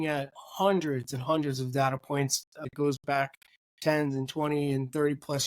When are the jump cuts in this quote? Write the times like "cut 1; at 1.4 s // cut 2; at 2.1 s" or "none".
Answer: cut 1; at 2.7 s